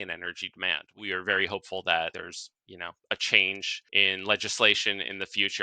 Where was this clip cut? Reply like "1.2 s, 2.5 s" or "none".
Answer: 0.9 s, 2.1 s, 3.8 s